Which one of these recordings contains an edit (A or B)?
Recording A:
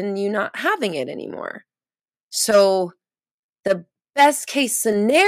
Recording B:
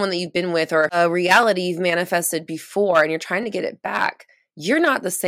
B